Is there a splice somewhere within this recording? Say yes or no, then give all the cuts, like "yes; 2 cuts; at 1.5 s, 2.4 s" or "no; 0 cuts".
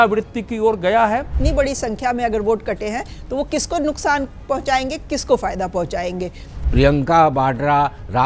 yes; 2 cuts; at 1.3 s, 6.6 s